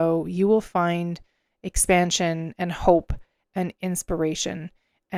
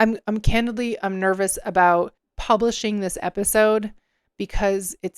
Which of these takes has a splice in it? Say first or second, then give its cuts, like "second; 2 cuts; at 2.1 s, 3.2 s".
second; 1 cut; at 2.3 s